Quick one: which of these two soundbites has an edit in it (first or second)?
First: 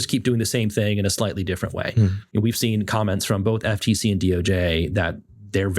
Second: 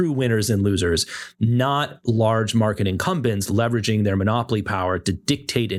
first